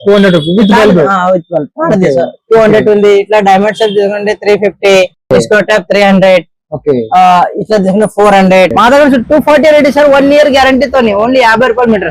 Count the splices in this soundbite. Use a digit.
1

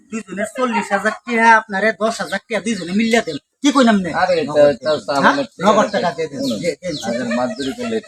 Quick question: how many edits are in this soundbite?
0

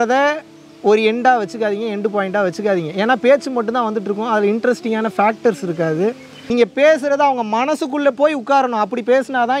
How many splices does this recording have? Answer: 1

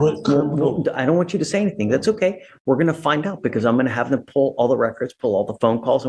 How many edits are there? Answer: 0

